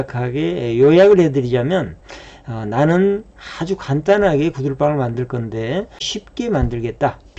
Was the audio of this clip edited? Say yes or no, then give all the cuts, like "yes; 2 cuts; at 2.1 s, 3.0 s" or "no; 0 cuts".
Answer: yes; 1 cut; at 6.1 s